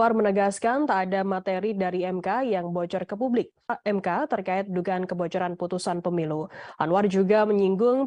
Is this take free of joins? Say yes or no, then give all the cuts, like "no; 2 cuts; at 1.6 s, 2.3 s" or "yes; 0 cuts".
no; 1 cut; at 3.8 s